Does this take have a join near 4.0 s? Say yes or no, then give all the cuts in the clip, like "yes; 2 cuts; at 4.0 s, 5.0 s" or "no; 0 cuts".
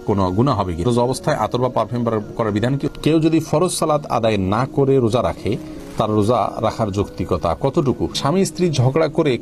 no; 3 cuts; at 0.8 s, 2.3 s, 8.2 s